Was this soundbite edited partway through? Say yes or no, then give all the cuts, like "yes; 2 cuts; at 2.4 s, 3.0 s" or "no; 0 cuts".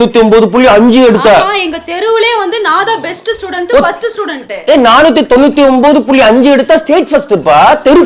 no; 0 cuts